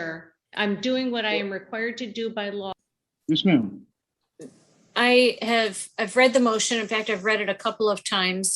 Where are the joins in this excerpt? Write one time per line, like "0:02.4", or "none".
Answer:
0:02.8